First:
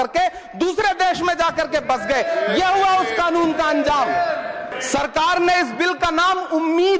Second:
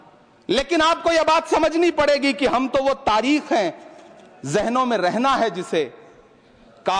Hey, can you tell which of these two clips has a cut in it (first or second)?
first